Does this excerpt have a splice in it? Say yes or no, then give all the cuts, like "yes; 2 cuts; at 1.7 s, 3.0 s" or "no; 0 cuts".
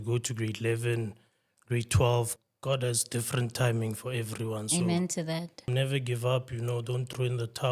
yes; 2 cuts; at 2.3 s, 5.7 s